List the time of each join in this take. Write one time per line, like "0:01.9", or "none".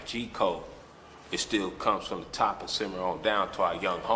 none